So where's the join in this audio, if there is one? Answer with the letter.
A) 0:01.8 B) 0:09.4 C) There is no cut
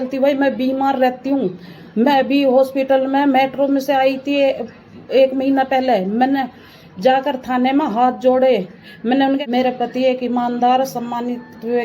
B